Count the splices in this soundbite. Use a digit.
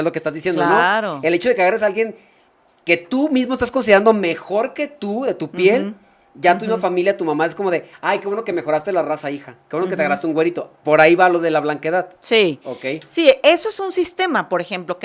0